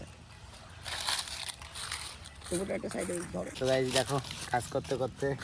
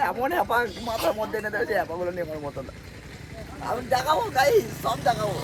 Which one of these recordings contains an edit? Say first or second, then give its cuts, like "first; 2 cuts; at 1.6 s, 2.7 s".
first; 1 cut; at 3.5 s